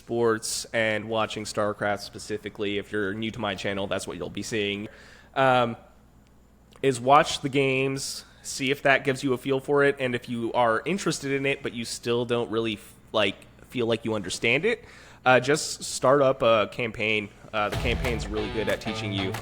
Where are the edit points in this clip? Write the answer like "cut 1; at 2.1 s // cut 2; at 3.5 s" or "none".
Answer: cut 1; at 4.9 s